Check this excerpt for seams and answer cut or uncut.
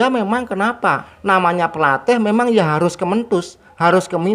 cut